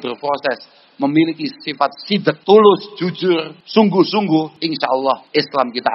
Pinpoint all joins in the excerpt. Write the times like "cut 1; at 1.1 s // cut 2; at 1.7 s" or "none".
cut 1; at 2.4 s // cut 2; at 3.5 s // cut 3; at 4.9 s